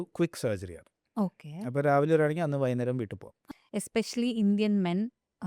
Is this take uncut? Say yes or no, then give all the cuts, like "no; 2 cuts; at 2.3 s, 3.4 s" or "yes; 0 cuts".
no; 1 cut; at 3.3 s